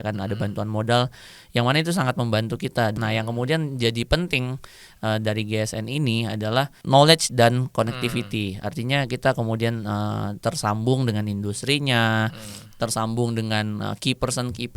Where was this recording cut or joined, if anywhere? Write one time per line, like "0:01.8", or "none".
0:02.9
0:06.8